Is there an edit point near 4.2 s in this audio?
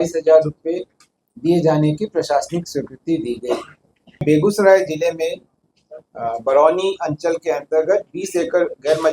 yes; 1 cut; at 4.2 s

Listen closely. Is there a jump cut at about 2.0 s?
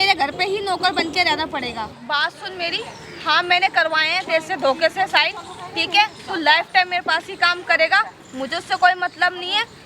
yes; 1 cut; at 2.0 s

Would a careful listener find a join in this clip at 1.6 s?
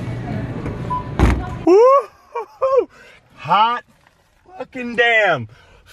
yes; 1 cut; at 1.6 s

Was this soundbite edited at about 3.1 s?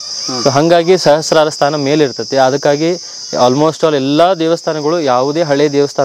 no; 0 cuts

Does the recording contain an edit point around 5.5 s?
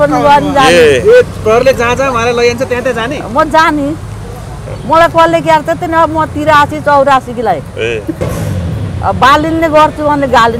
no; 1 cut; at 8.2 s

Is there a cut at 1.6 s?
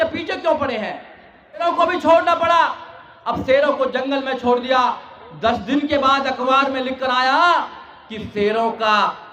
yes; 1 cut; at 1.6 s

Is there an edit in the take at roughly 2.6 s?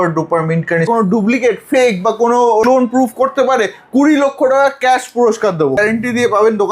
yes; 3 cuts; at 0.9 s, 2.6 s, 5.8 s

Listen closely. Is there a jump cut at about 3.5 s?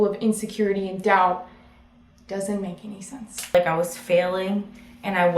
yes; 1 cut; at 3.5 s

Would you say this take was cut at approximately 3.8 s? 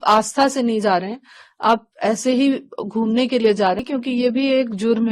yes; 1 cut; at 3.8 s

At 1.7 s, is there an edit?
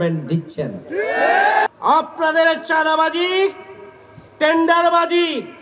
yes; 1 cut; at 1.7 s

